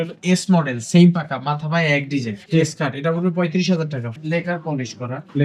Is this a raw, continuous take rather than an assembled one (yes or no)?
no